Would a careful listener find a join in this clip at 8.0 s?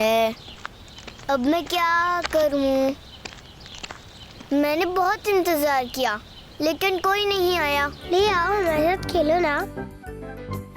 yes; 1 cut; at 8.0 s

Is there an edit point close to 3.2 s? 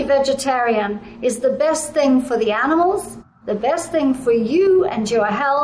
no; 0 cuts

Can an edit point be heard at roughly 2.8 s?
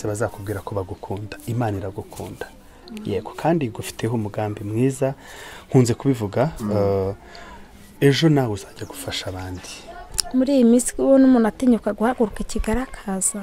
no; 1 cut; at 10.0 s

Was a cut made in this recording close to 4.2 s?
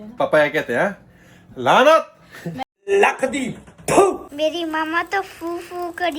yes; 1 cut; at 4.2 s

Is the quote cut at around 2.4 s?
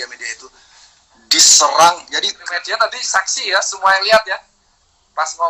yes; 1 cut; at 2.4 s

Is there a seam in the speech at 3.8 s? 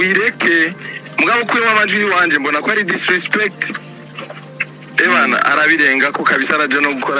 no; 0 cuts

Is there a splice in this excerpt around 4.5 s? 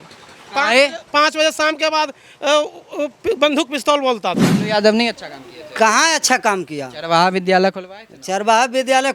yes; 1 cut; at 4.5 s

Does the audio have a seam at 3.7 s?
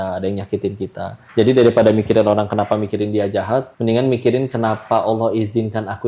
yes; 2 cuts; at 1.1 s, 3.7 s

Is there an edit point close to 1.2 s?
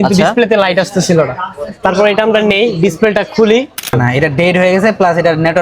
no; 1 cut; at 3.9 s

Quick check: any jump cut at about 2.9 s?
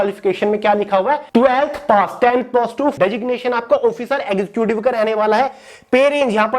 yes; 2 cuts; at 1.2 s, 2.9 s

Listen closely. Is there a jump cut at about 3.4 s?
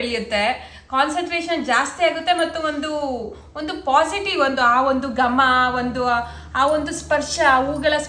no; 0 cuts

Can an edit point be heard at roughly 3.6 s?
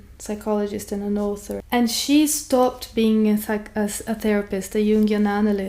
no; 1 cut; at 1.6 s

